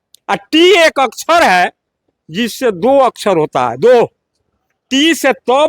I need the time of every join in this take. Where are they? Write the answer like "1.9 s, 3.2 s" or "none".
none